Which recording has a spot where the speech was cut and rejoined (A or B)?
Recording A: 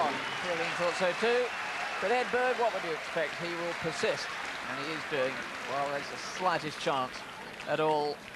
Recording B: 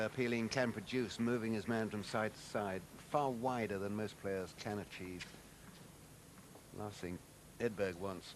A